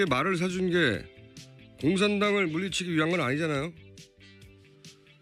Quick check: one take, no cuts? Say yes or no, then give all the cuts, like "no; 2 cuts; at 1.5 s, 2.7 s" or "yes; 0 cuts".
no; 1 cut; at 2.2 s